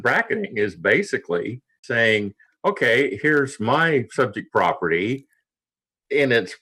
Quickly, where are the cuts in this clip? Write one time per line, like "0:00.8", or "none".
0:01.9